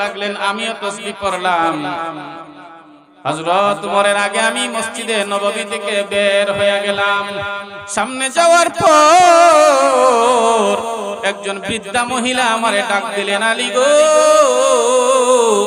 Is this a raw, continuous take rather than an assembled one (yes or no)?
yes